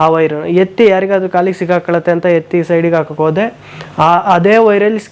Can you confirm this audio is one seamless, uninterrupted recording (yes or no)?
yes